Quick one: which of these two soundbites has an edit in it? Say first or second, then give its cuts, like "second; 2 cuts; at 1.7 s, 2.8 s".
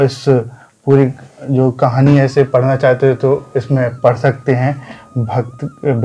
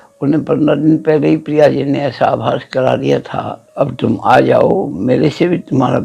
second; 1 cut; at 3.6 s